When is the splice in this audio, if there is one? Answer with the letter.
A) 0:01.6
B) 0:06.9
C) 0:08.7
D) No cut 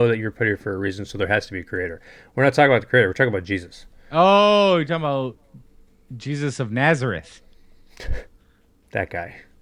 D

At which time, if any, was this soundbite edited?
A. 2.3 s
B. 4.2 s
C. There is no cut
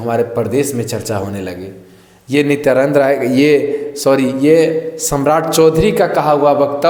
C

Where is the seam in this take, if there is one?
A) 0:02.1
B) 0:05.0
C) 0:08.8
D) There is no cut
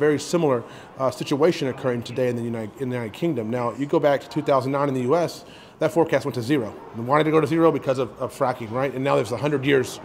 A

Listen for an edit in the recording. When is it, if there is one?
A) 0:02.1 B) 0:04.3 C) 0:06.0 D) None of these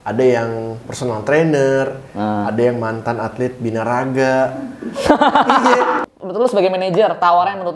C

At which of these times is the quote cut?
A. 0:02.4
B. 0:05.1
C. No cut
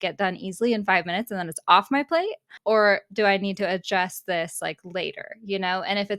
A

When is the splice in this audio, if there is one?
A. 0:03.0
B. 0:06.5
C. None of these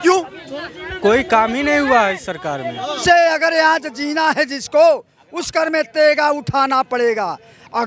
A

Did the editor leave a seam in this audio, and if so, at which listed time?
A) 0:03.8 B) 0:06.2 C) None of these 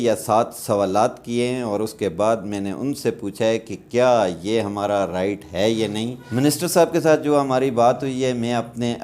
B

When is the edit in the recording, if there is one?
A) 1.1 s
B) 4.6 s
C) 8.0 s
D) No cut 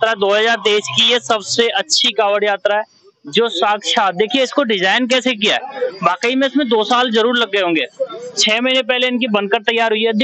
D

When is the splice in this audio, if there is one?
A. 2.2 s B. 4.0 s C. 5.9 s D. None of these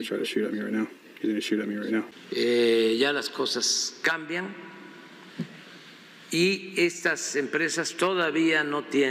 A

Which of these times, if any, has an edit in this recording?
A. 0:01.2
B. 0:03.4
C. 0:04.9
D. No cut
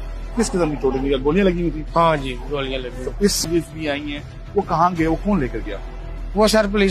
B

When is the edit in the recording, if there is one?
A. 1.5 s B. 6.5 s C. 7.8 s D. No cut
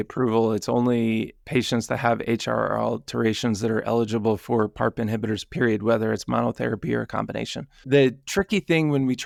D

